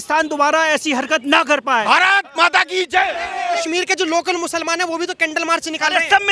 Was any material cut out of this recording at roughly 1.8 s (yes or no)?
yes